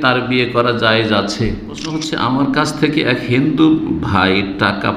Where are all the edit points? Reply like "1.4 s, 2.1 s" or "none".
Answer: 2.1 s